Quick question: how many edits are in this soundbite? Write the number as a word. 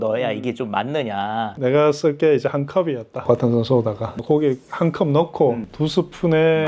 two